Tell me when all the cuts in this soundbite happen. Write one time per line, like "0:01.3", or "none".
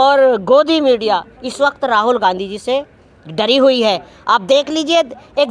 none